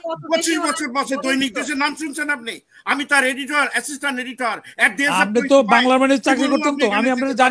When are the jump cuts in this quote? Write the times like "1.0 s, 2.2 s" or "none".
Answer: none